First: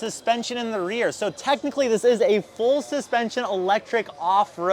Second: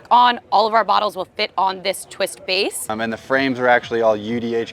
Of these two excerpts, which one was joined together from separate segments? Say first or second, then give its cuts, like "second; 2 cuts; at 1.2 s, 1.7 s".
second; 1 cut; at 2.9 s